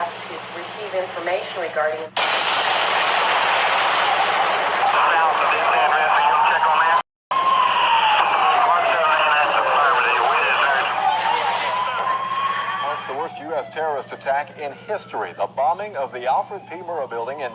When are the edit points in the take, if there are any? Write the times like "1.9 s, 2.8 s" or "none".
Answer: none